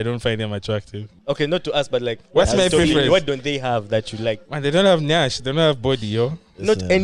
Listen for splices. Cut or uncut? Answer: cut